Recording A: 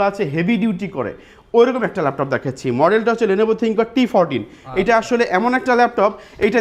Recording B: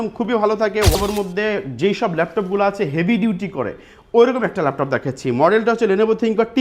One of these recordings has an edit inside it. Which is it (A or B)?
B